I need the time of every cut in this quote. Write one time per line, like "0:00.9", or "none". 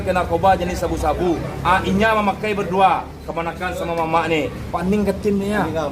0:04.6